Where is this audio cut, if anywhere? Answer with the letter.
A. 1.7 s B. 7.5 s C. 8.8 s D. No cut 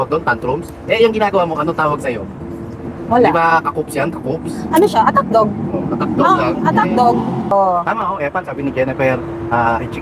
B